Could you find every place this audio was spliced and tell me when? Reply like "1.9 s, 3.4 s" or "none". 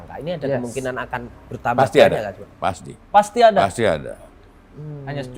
none

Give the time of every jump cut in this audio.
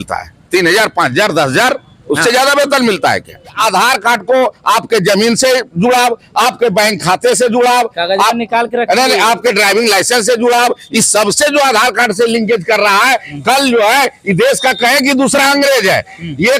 3.6 s

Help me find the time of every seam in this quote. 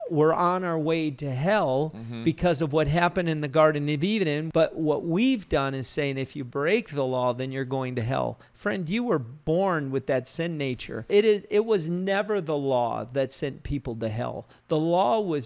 4.4 s, 9.4 s, 11.1 s

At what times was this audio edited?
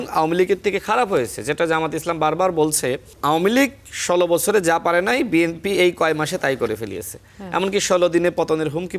3.1 s

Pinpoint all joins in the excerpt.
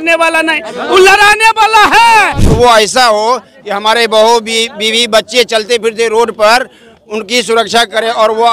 2.4 s

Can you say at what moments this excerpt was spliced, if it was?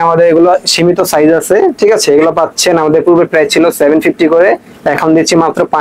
none

